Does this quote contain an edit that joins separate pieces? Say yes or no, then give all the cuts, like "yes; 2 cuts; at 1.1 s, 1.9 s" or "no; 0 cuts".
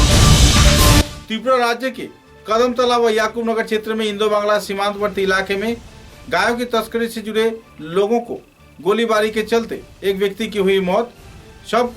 yes; 1 cut; at 1.1 s